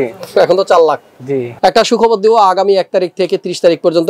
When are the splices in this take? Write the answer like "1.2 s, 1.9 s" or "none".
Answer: 1.5 s